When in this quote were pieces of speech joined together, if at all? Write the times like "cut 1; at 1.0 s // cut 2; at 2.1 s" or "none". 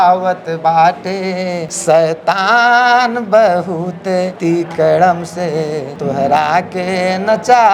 cut 1; at 1.7 s // cut 2; at 4.3 s // cut 3; at 5.9 s